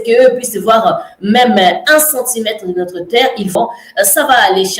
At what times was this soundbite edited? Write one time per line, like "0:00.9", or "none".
0:03.5